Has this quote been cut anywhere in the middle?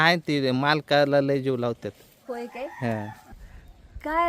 yes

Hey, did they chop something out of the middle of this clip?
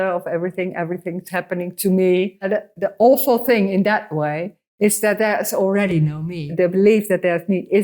yes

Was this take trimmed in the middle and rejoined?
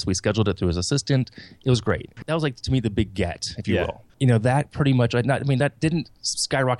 yes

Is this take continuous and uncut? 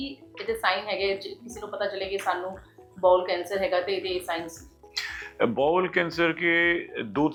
yes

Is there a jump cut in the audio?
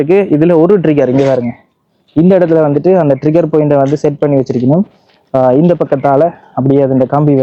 no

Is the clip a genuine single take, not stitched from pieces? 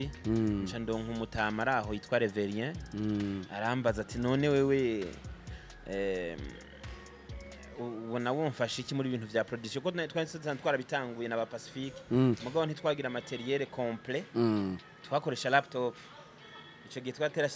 yes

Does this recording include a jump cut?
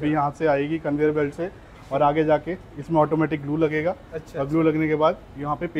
no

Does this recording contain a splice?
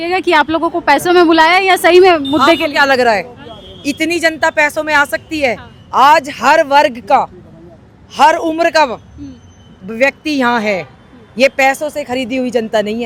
no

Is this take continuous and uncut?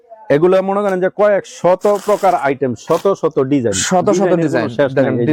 yes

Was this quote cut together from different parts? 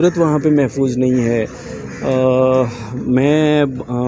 no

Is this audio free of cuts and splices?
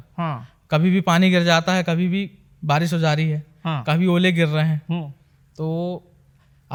yes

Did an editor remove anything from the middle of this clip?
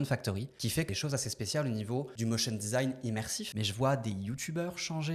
yes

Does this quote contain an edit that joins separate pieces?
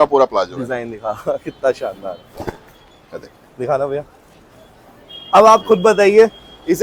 no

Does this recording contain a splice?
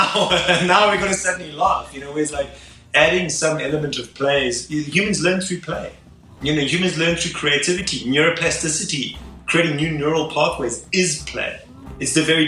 no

